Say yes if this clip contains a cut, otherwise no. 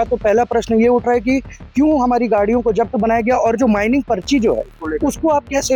no